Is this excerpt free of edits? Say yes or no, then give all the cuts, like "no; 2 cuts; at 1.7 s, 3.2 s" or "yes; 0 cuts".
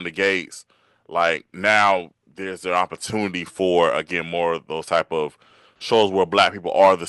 yes; 0 cuts